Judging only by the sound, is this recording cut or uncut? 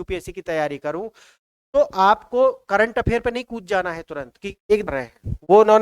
cut